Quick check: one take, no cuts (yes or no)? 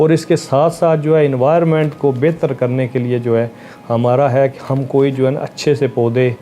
yes